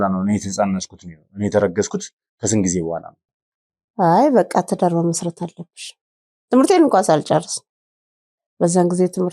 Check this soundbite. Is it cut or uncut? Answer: cut